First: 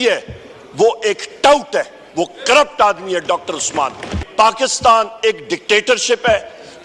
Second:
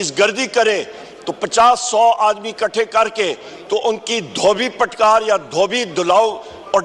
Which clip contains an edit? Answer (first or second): first